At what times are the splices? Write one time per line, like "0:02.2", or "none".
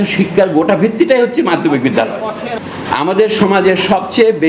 0:02.5